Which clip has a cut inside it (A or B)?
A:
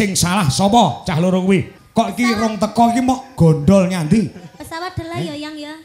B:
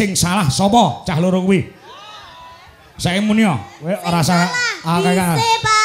A